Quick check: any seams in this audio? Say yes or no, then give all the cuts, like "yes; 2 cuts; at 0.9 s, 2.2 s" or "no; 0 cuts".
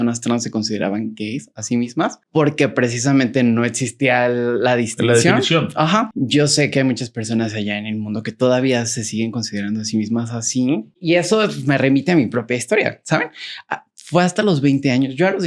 yes; 3 cuts; at 2.2 s, 6.1 s, 10.9 s